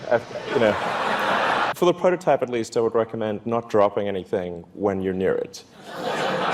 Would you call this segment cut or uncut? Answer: cut